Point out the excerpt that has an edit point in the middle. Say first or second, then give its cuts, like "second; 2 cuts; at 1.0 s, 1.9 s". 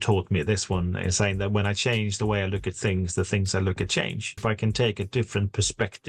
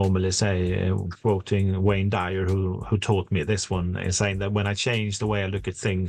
first; 1 cut; at 4.4 s